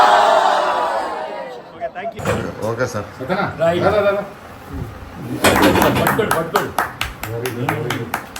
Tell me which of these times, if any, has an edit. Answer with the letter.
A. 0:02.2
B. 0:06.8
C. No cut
A